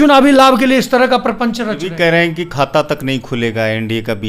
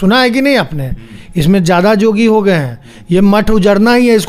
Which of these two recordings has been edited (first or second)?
first